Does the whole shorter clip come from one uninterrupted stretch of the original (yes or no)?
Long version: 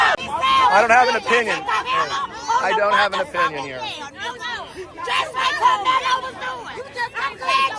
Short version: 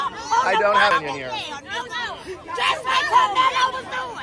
no